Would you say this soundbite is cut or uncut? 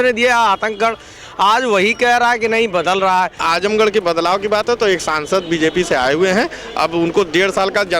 cut